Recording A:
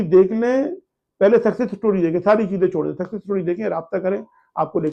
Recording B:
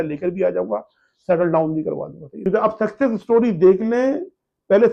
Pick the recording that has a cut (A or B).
B